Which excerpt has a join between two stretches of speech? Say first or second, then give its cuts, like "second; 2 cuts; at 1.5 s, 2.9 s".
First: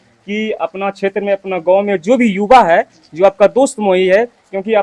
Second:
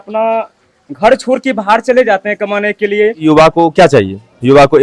second; 1 cut; at 3.2 s